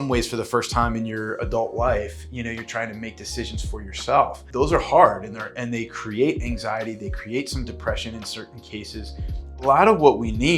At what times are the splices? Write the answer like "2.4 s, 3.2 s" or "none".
4.4 s, 9.5 s